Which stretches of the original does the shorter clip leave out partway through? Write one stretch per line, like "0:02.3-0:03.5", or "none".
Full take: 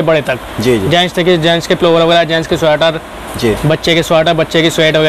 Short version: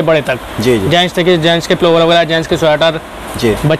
none